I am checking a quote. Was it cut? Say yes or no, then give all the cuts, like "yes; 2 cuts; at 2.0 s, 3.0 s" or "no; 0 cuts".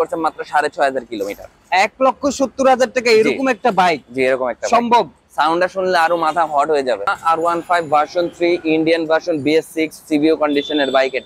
no; 0 cuts